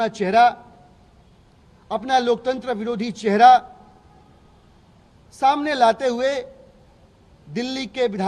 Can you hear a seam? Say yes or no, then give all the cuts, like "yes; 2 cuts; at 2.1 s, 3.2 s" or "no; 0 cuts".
no; 0 cuts